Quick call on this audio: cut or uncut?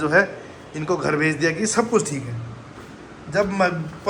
uncut